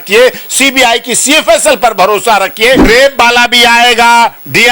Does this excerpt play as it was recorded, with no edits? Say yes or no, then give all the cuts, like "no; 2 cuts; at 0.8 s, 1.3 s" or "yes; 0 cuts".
no; 1 cut; at 2.9 s